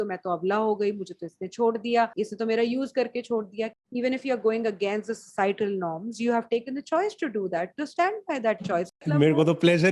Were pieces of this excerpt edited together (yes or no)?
yes